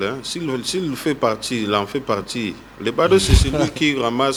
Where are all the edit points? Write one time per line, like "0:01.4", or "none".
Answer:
none